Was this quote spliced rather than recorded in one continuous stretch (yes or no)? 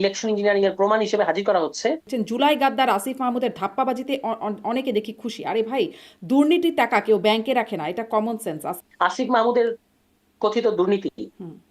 yes